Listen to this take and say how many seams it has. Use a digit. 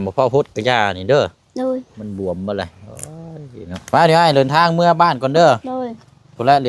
1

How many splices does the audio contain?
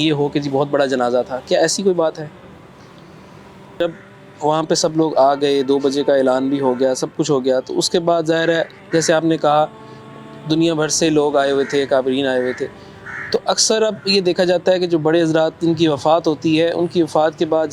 1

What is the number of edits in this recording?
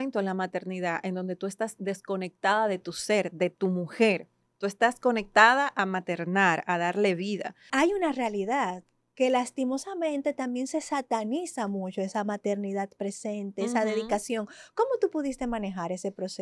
1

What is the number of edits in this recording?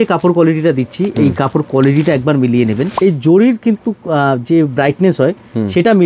1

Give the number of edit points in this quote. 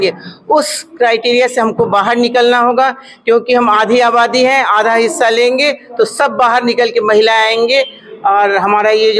0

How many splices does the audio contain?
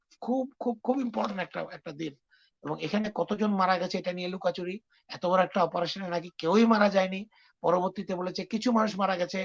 0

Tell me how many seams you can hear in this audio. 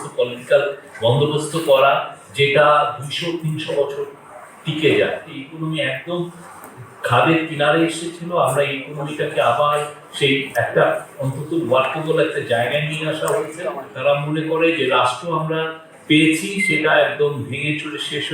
2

